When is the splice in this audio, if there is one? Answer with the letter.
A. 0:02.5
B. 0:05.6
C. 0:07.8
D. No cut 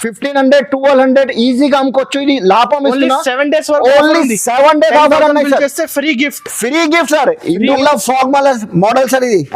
C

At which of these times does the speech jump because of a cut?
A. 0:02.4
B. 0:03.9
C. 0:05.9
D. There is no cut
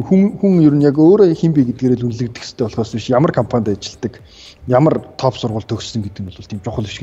D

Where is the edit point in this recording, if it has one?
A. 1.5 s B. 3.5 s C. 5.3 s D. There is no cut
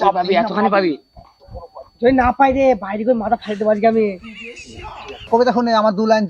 C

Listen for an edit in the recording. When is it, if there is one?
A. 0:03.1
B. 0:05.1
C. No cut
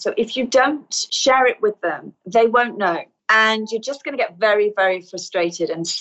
A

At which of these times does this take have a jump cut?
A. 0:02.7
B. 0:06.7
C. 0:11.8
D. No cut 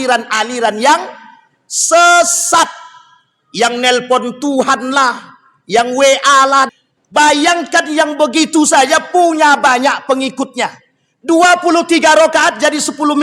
B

